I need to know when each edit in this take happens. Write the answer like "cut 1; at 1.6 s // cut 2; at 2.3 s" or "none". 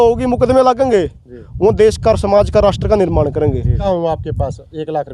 cut 1; at 3.8 s

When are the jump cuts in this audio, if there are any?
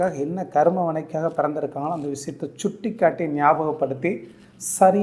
none

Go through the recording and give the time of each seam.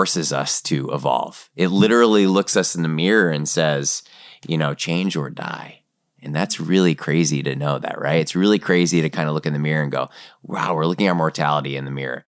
cut 1; at 11.3 s

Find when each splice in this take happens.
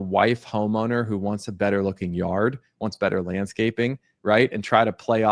none

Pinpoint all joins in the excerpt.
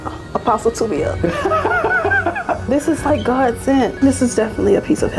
cut 1; at 2.7 s // cut 2; at 3.9 s

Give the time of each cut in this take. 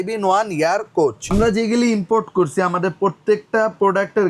cut 1; at 1.2 s

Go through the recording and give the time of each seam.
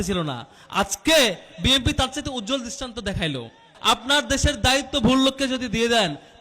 cut 1; at 3.7 s

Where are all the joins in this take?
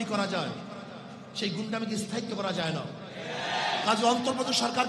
cut 1; at 3.5 s

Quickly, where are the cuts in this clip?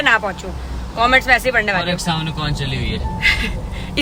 none

